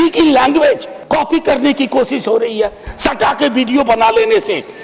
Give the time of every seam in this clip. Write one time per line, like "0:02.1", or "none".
0:00.9
0:02.9